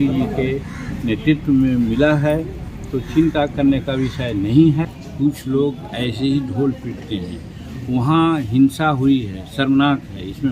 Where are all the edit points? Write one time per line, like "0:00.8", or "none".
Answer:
0:05.0